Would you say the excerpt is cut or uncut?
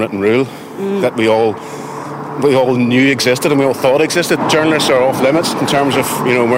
cut